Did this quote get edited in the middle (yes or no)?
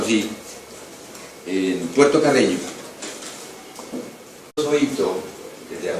no